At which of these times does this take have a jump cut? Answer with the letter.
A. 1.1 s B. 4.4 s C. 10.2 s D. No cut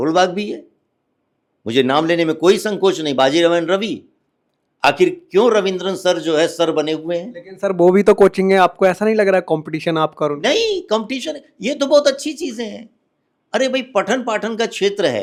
D